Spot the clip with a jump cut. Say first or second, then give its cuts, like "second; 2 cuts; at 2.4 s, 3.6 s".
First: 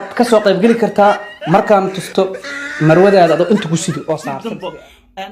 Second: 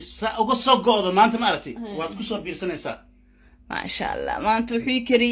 first; 1 cut; at 4.3 s